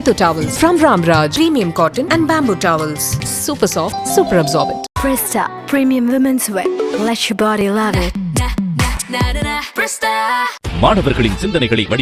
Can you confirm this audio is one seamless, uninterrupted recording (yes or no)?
yes